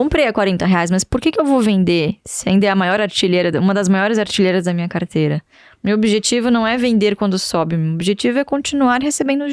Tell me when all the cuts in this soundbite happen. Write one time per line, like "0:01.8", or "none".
none